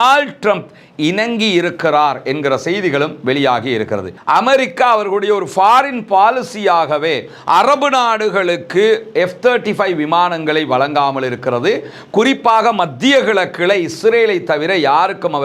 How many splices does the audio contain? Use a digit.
1